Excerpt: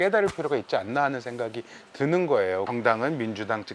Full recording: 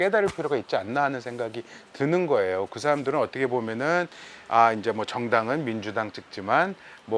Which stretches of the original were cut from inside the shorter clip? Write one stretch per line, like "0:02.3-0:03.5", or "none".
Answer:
0:02.7-0:05.1